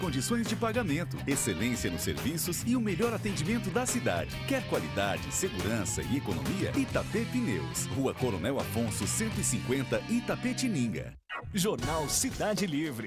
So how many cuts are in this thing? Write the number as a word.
one